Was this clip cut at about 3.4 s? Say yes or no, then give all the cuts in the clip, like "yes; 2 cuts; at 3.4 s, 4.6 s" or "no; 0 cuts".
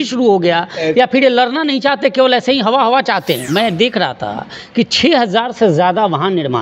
yes; 1 cut; at 3.4 s